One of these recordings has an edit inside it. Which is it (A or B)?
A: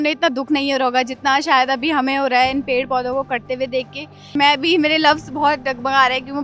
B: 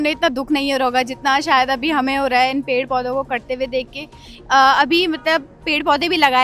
A